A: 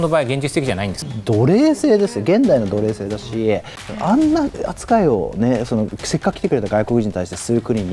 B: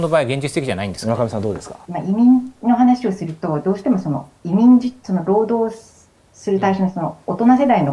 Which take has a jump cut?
A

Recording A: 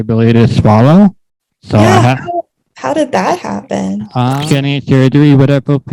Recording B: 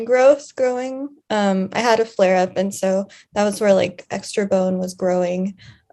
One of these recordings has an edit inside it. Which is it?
A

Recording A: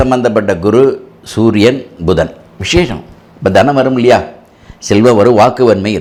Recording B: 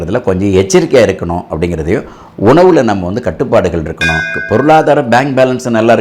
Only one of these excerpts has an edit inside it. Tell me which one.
B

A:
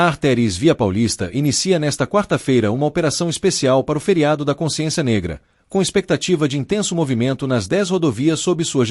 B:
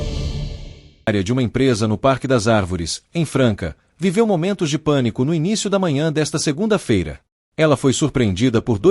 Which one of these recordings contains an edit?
B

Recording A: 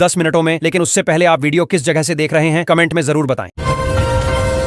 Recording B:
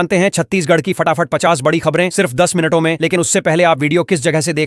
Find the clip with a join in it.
A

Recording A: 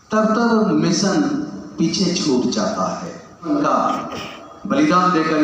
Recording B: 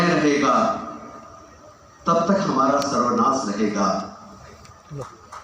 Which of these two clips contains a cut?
A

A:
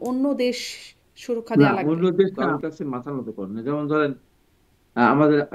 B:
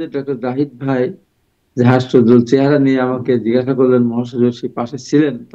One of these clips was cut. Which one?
A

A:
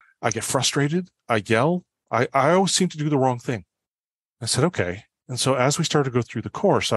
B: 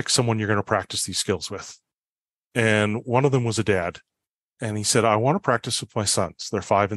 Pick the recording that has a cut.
A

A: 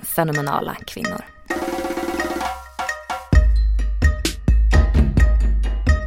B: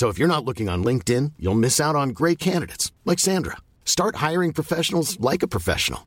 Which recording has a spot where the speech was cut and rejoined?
A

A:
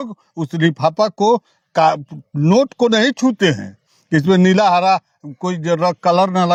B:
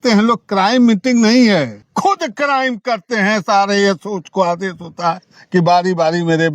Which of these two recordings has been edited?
B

